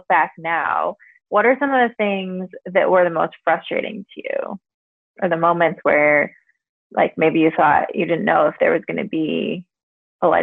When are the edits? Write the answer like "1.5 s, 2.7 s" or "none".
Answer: none